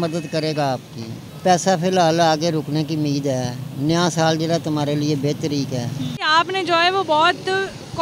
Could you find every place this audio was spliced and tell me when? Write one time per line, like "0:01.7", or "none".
0:01.3
0:06.3